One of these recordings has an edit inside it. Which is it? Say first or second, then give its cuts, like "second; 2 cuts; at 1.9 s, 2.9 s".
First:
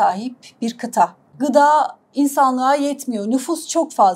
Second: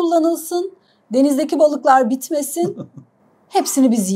first; 1 cut; at 1.2 s